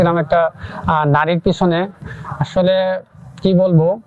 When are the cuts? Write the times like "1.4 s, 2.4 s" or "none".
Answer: none